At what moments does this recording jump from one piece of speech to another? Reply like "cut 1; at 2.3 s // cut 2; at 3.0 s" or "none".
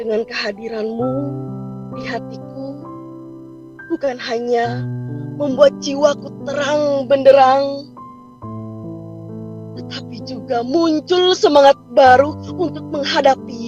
none